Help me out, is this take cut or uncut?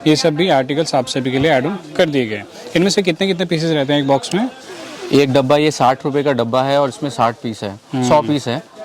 uncut